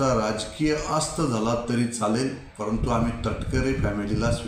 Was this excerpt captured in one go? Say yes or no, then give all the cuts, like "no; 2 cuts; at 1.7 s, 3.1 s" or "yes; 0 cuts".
yes; 0 cuts